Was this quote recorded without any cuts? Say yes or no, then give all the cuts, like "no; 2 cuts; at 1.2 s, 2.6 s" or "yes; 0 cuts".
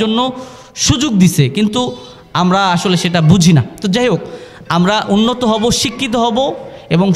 yes; 0 cuts